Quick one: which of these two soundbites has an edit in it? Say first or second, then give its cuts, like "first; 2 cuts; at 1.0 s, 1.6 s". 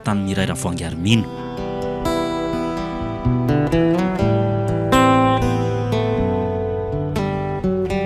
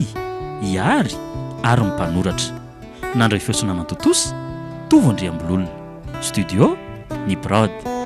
first; 1 cut; at 1.3 s